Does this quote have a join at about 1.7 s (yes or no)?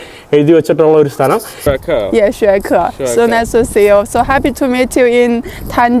yes